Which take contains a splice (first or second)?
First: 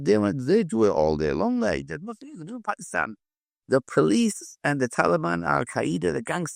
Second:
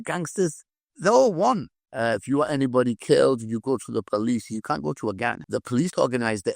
second